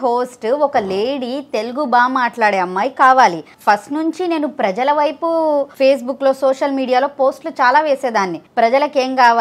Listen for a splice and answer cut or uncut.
cut